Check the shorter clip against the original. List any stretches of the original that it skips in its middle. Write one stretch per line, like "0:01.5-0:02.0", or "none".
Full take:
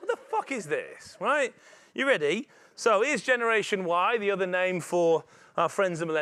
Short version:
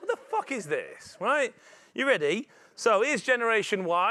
none